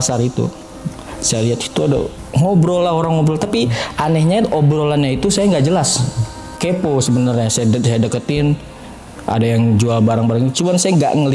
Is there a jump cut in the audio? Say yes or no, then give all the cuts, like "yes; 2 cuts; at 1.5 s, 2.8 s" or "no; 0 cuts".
yes; 2 cuts; at 2.2 s, 6.4 s